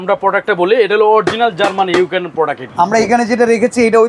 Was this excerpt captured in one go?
no; 1 cut; at 2.6 s

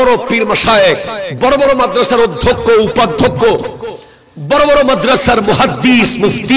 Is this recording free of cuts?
yes; 0 cuts

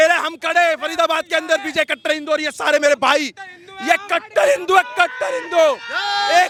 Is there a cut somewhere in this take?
no; 0 cuts

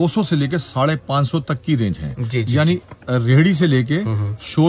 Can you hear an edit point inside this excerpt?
no; 0 cuts

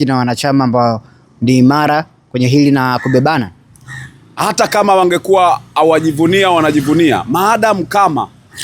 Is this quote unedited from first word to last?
yes; 0 cuts

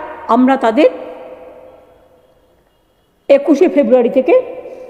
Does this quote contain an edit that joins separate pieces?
no; 0 cuts

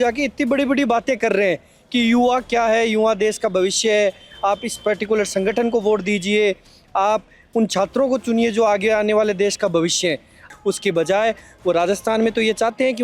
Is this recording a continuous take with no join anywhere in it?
no; 1 cut; at 10.4 s

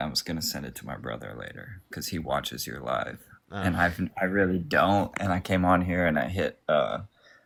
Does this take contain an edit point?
no; 0 cuts

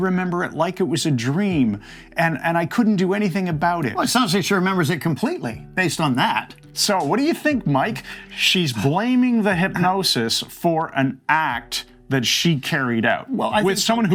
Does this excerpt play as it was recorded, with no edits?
yes; 0 cuts

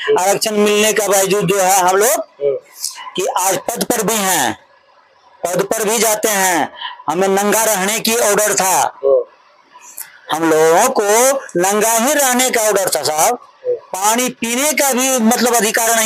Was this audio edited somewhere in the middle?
no; 0 cuts

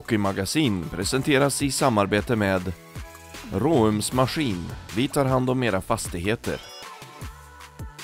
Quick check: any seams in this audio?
no; 0 cuts

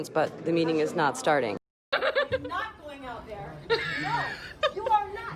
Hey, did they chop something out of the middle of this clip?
yes; 1 cut; at 1.6 s

